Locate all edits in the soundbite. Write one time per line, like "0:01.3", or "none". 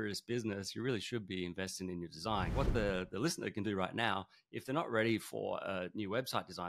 0:02.5